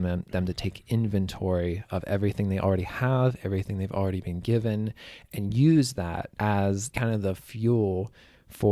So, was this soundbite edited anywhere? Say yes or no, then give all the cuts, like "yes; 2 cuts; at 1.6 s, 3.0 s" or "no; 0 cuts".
yes; 2 cuts; at 6.3 s, 6.9 s